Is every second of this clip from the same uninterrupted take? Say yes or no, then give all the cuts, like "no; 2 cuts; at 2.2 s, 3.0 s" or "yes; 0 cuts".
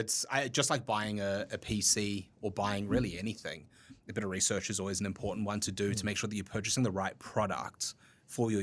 yes; 0 cuts